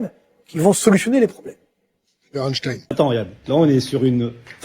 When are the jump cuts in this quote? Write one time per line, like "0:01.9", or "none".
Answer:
0:02.9